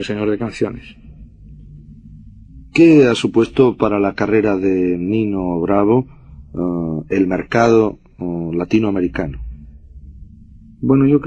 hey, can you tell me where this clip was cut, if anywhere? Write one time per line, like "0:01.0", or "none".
none

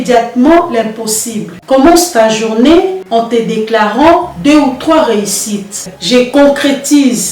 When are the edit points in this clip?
0:01.6
0:05.8

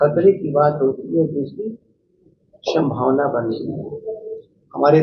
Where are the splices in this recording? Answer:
none

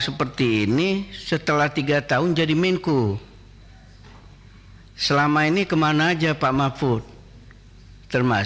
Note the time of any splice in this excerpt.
none

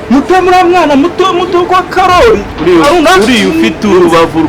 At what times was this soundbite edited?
none

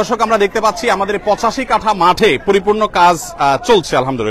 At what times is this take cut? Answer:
none

